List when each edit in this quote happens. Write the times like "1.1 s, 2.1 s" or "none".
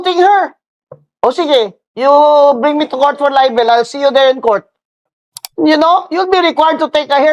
none